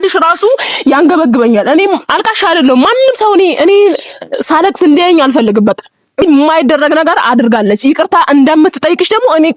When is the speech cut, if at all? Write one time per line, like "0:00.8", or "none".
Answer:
0:06.2